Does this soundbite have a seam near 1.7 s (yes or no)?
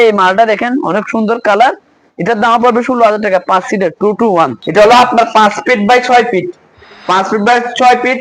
no